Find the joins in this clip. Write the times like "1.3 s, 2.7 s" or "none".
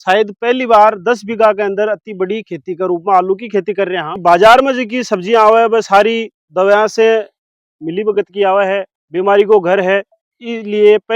4.2 s, 8.9 s